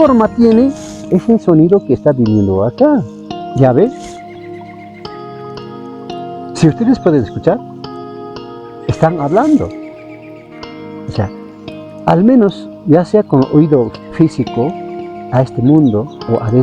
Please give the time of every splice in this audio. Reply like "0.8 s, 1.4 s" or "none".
3.4 s

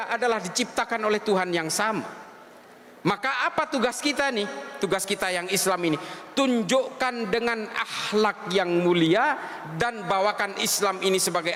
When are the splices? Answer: none

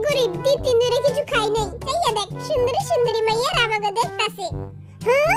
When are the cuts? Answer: 1.8 s

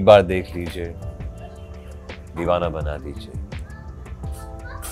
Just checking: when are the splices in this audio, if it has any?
none

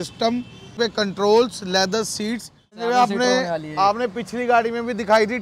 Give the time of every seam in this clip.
0.7 s, 2.8 s

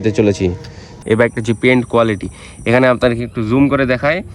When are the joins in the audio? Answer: 1.0 s

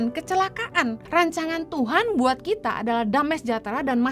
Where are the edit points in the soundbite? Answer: 1.0 s

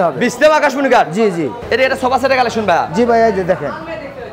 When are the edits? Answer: 1.6 s

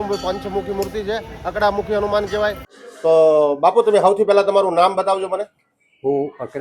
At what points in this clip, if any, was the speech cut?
2.7 s

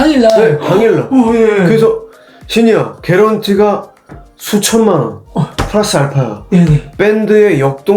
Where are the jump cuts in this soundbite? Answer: none

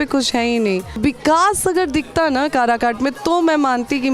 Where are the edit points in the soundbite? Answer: 0.9 s

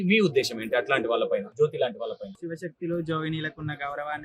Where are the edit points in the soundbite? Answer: 1.5 s, 2.4 s

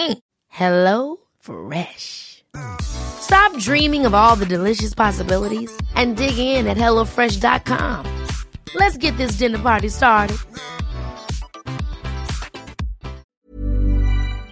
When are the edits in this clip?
13.4 s

